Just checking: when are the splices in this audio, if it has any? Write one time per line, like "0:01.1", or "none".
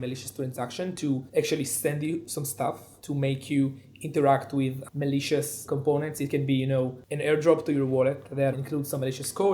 0:01.3
0:02.9
0:05.6
0:08.5